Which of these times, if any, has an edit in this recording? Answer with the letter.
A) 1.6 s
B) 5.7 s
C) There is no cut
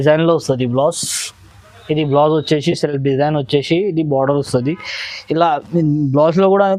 C